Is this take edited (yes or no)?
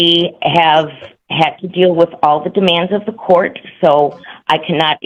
no